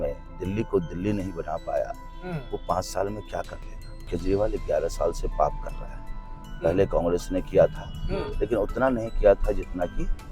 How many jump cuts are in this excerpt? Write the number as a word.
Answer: one